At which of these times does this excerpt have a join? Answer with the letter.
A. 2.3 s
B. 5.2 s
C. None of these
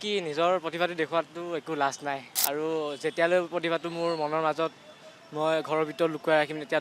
A